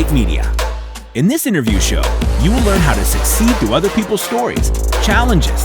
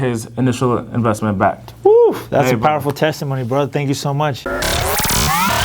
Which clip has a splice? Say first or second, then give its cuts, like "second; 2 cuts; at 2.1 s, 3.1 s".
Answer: second; 1 cut; at 4.4 s